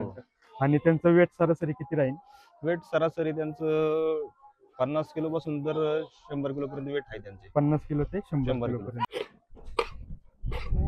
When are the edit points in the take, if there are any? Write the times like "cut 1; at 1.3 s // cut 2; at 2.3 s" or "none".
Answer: cut 1; at 9.1 s